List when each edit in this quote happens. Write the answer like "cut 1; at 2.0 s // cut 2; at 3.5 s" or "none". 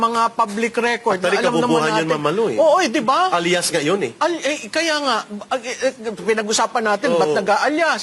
none